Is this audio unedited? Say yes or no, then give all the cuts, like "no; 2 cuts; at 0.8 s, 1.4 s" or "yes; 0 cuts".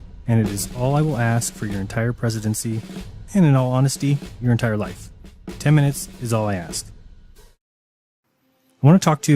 no; 1 cut; at 8.3 s